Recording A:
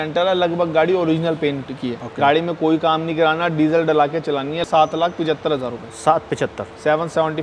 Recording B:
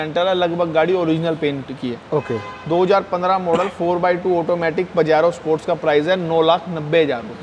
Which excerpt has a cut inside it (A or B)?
A